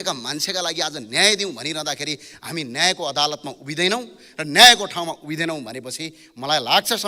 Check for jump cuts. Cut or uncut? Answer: uncut